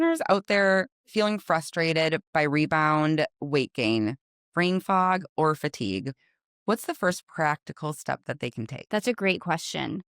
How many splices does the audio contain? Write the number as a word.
one